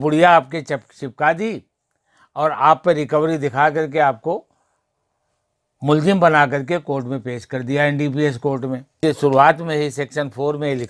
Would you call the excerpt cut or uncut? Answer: cut